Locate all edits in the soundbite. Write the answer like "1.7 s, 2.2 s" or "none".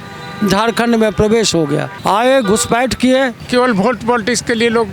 1.9 s, 3.4 s